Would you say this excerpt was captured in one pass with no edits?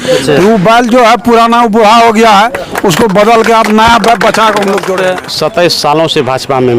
no; 1 cut; at 4.9 s

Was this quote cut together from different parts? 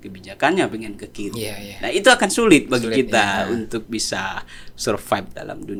no; 0 cuts

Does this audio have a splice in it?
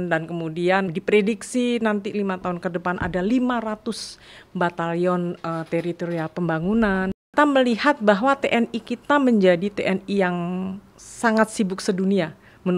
yes; 2 cuts; at 0.9 s, 7.1 s

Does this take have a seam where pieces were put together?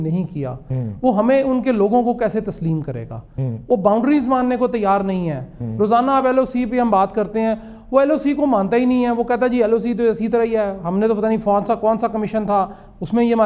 no; 0 cuts

